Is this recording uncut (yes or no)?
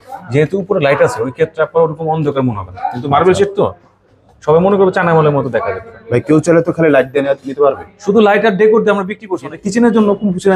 no